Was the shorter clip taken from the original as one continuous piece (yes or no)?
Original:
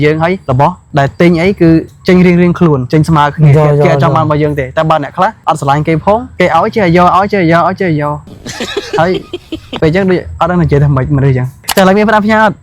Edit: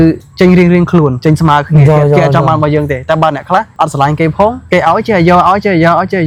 yes